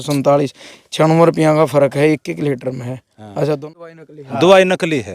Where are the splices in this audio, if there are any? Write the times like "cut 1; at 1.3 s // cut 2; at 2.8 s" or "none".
cut 1; at 3.7 s